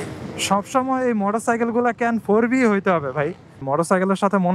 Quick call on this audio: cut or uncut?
cut